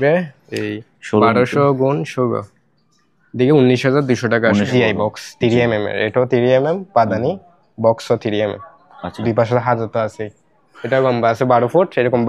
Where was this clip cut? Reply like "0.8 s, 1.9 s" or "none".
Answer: 4.7 s